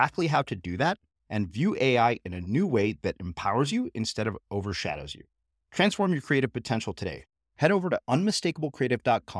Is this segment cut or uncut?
uncut